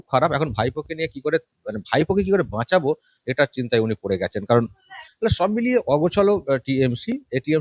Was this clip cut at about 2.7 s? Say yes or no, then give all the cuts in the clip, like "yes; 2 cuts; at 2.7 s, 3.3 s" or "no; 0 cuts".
no; 1 cut; at 5.0 s